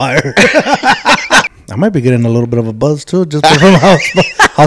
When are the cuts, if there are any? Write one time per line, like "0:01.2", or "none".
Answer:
0:01.6